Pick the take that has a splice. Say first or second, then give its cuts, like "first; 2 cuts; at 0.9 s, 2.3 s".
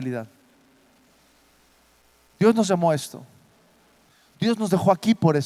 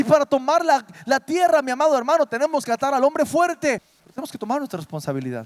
second; 1 cut; at 3.9 s